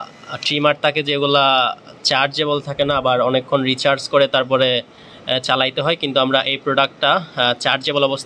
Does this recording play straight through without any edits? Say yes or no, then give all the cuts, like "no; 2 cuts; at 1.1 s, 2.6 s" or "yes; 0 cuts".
yes; 0 cuts